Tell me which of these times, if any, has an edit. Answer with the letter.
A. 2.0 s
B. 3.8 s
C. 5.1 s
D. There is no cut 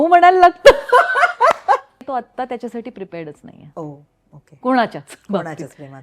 A